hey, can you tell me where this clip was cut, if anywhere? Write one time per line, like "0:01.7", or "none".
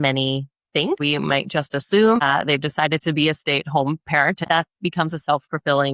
0:01.0
0:02.2
0:04.4

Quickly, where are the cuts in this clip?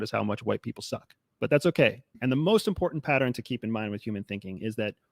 0:02.1

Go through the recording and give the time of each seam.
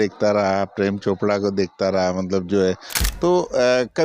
0:03.0

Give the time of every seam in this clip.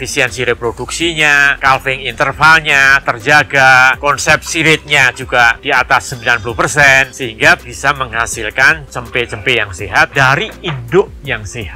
0:01.5
0:04.0
0:07.1
0:10.1

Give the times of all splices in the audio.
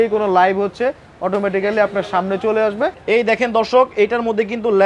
0:03.0

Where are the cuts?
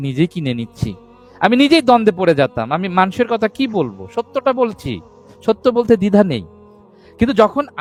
none

